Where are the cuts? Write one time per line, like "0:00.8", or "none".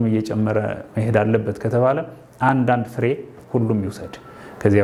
none